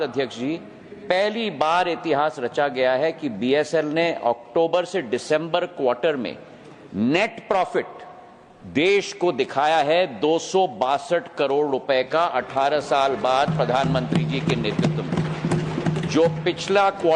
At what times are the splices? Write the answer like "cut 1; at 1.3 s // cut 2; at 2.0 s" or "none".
none